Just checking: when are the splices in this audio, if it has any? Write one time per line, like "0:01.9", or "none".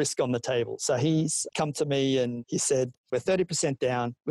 0:01.5
0:02.9